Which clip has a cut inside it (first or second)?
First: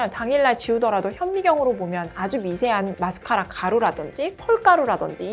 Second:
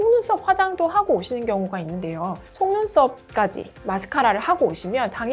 second